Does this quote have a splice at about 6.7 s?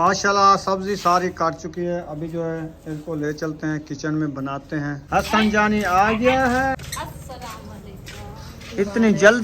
yes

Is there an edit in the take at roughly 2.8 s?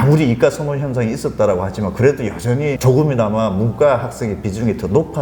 yes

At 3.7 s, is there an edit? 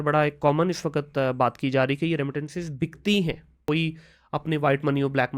yes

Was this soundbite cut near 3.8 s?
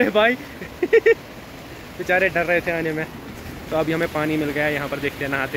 no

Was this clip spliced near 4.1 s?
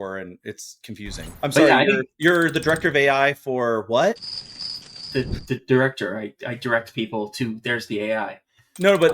no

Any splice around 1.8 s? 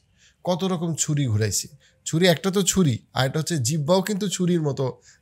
no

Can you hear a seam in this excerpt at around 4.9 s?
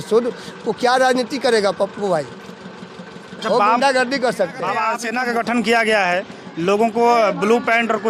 yes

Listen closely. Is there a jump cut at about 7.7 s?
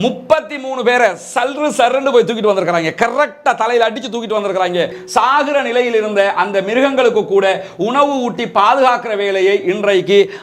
no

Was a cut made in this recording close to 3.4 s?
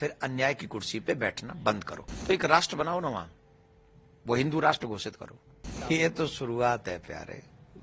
no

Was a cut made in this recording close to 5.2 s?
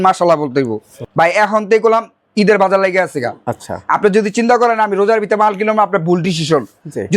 no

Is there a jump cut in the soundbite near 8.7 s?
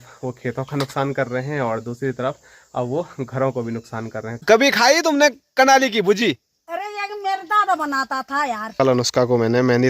yes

